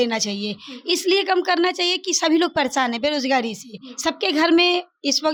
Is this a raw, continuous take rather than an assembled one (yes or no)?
yes